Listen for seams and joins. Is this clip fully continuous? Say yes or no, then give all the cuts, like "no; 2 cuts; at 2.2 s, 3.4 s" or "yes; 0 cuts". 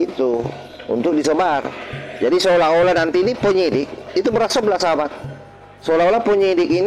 yes; 0 cuts